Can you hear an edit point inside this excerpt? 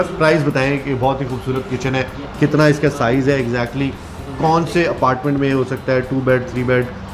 no; 0 cuts

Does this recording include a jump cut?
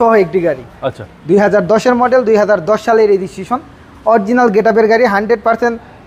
no; 0 cuts

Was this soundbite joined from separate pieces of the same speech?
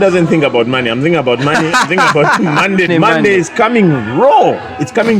yes; 1 cut; at 2.9 s

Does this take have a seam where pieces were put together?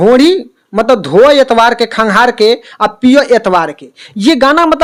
no; 0 cuts

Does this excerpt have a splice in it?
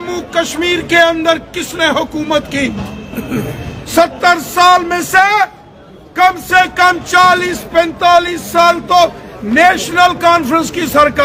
no; 0 cuts

